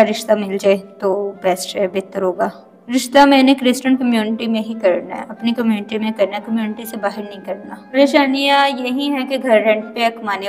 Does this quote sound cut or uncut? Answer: cut